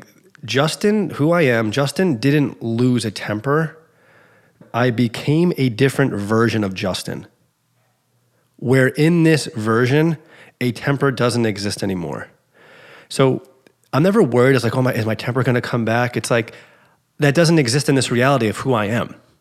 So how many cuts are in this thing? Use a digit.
1